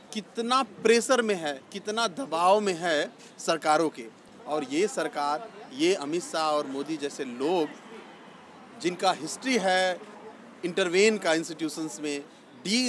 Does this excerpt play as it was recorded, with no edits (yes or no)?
yes